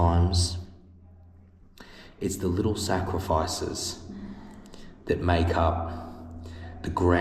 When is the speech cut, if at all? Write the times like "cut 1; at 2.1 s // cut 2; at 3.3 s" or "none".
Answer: none